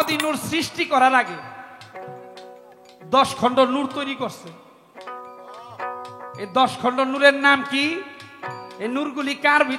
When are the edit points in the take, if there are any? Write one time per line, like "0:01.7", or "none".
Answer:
none